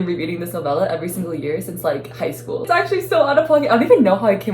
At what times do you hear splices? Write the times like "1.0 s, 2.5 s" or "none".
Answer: 2.6 s